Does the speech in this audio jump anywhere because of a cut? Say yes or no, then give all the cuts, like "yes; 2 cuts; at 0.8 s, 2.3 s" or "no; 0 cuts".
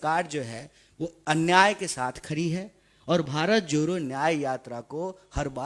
no; 0 cuts